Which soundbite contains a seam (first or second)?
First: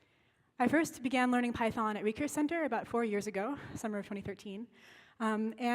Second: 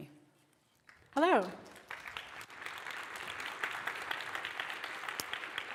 first